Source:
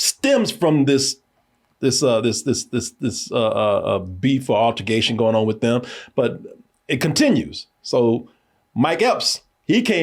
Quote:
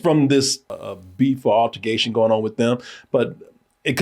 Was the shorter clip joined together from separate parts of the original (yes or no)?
yes